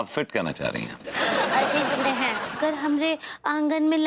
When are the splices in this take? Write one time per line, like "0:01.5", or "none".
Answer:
0:02.5